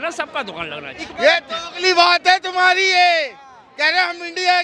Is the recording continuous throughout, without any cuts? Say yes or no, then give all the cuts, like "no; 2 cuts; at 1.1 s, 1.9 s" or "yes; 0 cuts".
no; 1 cut; at 1.1 s